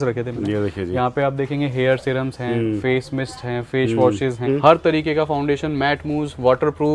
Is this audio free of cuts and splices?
no; 1 cut; at 4.5 s

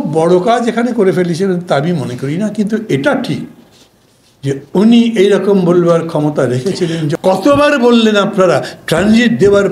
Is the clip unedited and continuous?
no; 1 cut; at 7.1 s

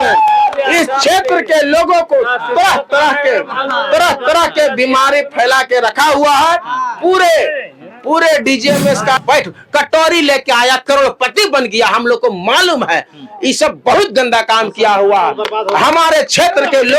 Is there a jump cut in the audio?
yes; 1 cut; at 9.2 s

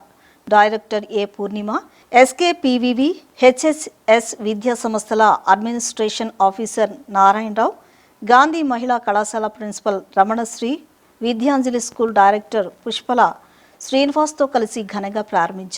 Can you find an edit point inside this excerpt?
yes; 1 cut; at 1.9 s

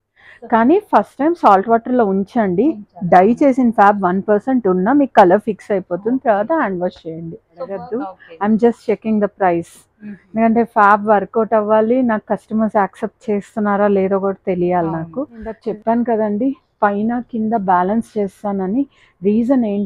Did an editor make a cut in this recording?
yes; 2 cuts; at 7.8 s, 15.6 s

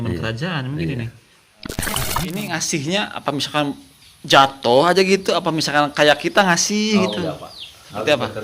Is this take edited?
yes; 1 cut; at 1.9 s

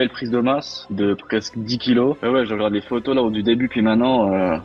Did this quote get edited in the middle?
yes; 1 cut; at 2.2 s

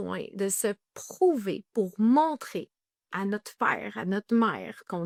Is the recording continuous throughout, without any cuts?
yes; 0 cuts

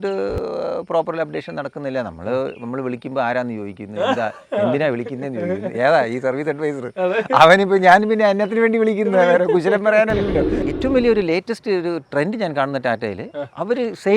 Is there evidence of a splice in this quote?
yes; 1 cut; at 10.6 s

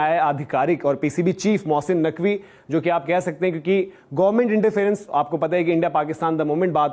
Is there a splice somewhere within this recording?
no; 0 cuts

